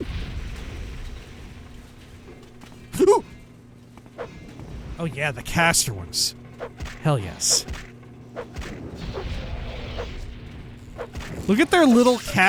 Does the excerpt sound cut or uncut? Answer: uncut